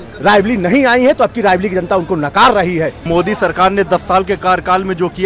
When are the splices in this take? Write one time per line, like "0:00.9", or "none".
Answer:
0:02.9

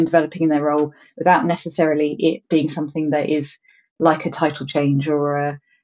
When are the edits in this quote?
none

